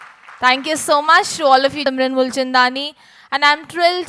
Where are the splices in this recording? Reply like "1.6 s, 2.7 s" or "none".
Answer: 1.8 s

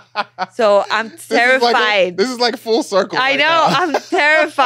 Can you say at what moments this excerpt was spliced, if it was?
none

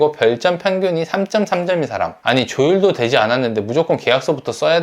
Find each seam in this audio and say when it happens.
2.2 s

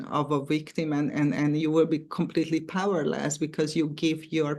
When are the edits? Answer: none

